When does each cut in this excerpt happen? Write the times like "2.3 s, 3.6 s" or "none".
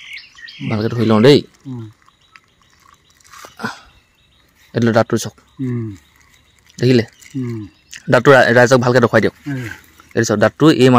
none